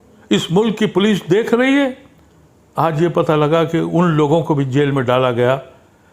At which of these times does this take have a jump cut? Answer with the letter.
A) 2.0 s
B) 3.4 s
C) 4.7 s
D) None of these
D